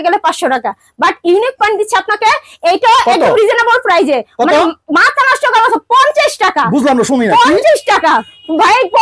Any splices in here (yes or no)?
no